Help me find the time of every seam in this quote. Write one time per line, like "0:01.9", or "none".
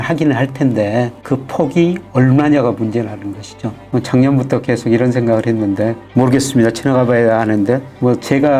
0:03.8